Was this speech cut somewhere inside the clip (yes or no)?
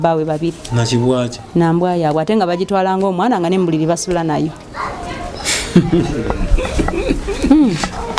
no